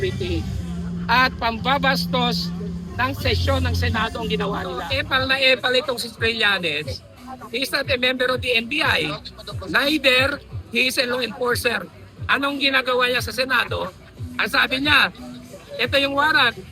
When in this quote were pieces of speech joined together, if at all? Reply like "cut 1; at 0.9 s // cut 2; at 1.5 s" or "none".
cut 1; at 4.9 s